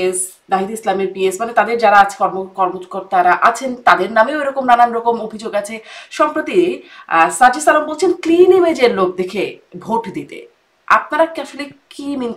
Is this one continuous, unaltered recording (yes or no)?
yes